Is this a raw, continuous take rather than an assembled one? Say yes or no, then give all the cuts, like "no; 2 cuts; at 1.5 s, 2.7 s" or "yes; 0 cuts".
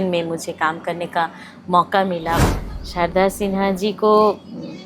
no; 1 cut; at 2.4 s